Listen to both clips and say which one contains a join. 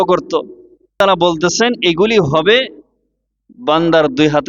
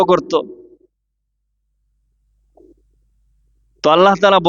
first; 1 cut; at 1.0 s

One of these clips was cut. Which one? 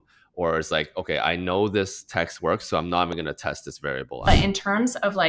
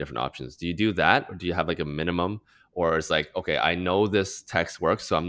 first; 1 cut; at 4.3 s

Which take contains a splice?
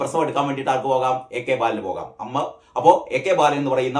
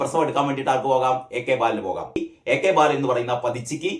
second; 1 cut; at 2.2 s

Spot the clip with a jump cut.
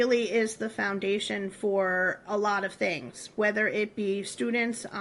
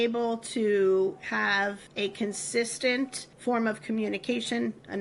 second; 2 cuts; at 1.8 s, 3.2 s

